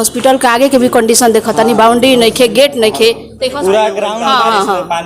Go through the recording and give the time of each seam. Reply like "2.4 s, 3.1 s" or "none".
4.1 s